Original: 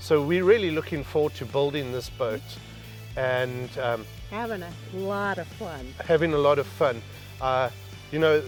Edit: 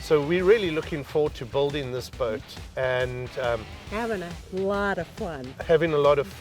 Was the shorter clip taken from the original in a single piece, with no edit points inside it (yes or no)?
no